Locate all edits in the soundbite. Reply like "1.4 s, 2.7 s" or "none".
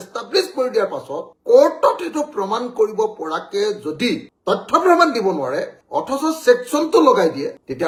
none